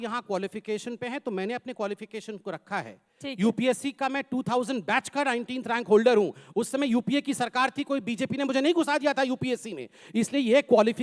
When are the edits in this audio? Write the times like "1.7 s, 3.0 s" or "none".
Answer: 9.5 s